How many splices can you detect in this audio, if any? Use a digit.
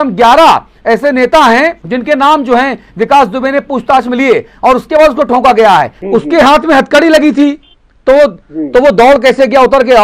2